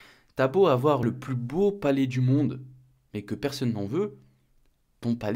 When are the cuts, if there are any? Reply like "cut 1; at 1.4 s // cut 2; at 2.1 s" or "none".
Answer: cut 1; at 1.0 s

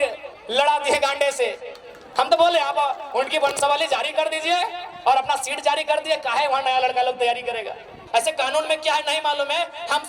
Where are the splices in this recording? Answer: cut 1; at 8.0 s

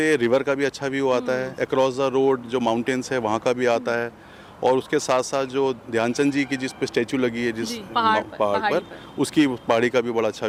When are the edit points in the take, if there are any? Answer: none

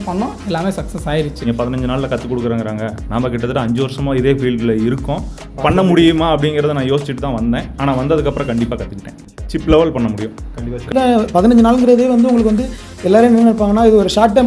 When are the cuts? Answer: cut 1; at 1.5 s // cut 2; at 10.9 s

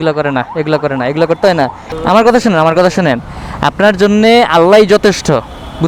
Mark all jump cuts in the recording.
cut 1; at 1.8 s

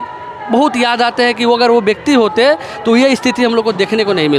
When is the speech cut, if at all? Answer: none

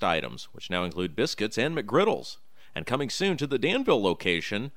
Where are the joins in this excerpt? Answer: none

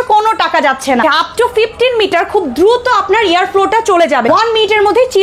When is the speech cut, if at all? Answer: cut 1; at 1.0 s // cut 2; at 4.2 s

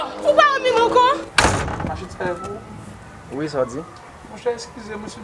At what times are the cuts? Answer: cut 1; at 1.3 s

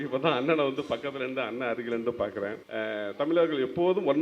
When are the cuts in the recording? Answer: cut 1; at 2.6 s

